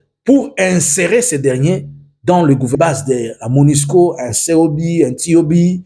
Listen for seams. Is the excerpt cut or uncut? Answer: cut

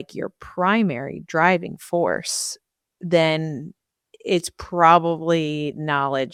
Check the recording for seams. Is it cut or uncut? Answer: uncut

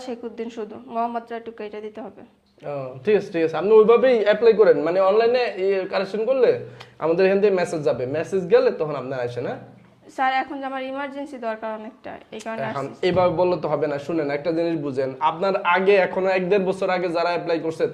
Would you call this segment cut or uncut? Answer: uncut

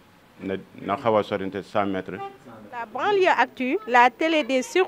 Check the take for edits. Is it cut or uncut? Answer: cut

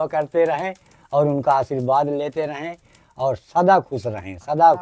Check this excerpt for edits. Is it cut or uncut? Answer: uncut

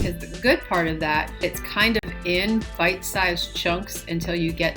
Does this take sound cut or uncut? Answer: cut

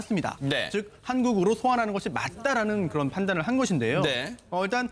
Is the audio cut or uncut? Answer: uncut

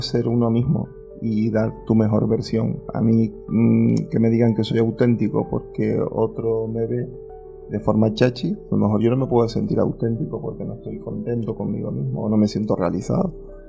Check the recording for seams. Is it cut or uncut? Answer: uncut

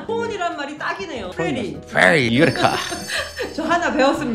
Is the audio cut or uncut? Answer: cut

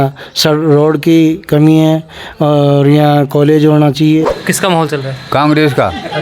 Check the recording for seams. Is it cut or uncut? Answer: cut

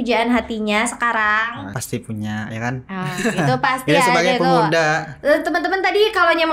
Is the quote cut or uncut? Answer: cut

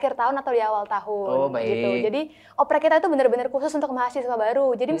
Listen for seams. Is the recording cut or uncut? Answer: uncut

